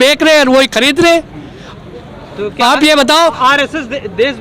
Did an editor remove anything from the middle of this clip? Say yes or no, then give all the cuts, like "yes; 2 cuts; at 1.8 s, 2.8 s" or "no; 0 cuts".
no; 0 cuts